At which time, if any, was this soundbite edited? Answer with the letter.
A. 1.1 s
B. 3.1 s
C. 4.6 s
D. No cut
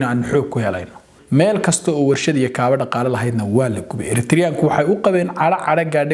A